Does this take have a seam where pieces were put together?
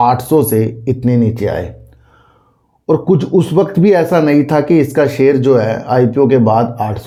no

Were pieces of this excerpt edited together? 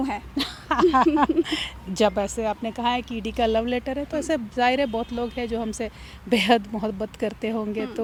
no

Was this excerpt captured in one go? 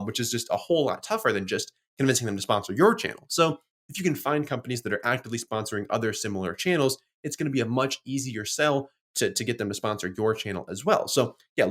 yes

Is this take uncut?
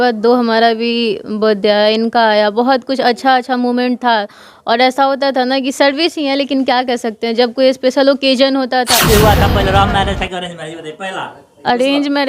no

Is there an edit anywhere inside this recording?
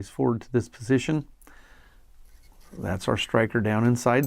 no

